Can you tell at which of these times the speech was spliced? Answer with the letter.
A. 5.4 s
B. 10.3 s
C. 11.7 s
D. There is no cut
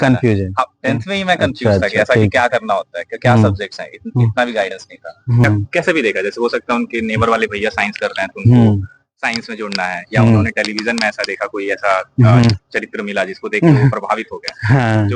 A